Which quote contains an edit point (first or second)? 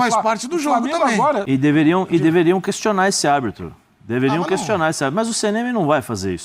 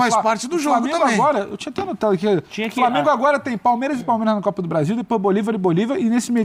first